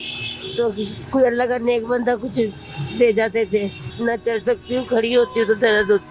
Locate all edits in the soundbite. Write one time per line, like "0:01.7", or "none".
0:03.8